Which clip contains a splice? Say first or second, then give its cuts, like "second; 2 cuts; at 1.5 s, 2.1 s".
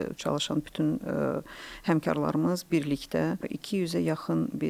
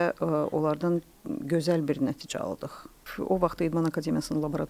second; 1 cut; at 3.0 s